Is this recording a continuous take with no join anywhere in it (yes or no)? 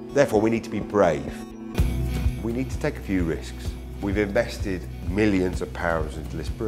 no